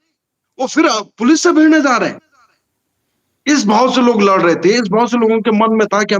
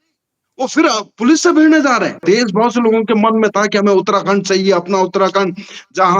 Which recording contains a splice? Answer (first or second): second